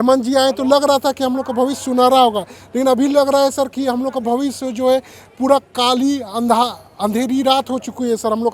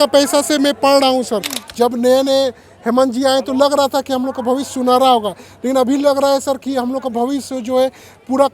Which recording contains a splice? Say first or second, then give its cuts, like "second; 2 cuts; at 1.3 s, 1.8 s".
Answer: second; 1 cut; at 1.6 s